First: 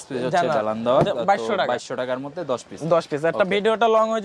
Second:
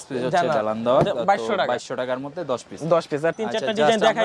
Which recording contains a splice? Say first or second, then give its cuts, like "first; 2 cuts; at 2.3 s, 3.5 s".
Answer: second; 1 cut; at 3.3 s